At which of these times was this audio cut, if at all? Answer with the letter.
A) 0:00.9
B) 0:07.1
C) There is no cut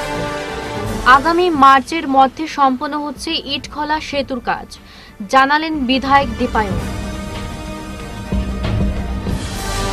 C